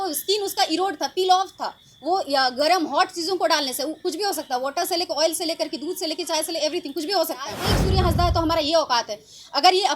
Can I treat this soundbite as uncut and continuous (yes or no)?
no